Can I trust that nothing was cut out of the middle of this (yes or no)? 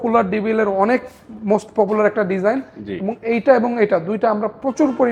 yes